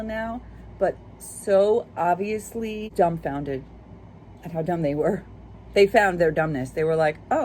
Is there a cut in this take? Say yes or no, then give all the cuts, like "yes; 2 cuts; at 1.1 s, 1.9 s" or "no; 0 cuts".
yes; 1 cut; at 2.9 s